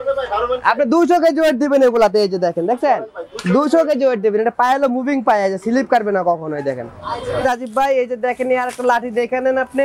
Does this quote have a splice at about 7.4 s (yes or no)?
yes